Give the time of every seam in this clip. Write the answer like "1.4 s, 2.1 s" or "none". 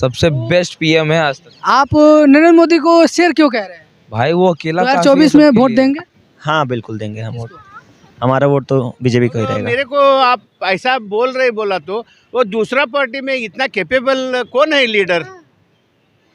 4.9 s, 9.7 s